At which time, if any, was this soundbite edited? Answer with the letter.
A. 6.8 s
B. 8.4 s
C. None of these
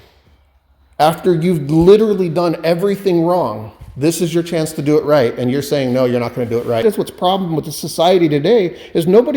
A